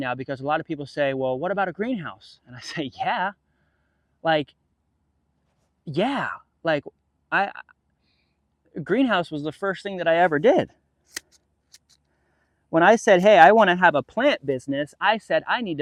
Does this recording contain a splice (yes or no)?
no